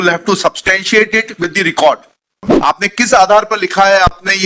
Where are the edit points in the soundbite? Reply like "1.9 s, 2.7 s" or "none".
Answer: 2.5 s